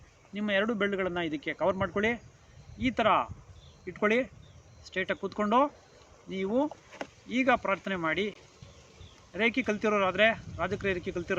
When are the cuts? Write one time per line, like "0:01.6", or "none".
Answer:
none